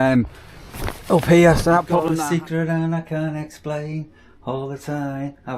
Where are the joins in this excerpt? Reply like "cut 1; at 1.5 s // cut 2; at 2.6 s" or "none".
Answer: cut 1; at 2.0 s